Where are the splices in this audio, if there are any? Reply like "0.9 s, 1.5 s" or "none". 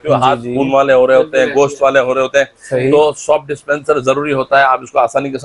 none

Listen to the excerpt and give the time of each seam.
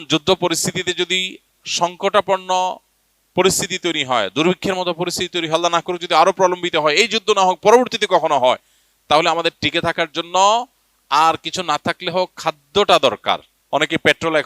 13.5 s

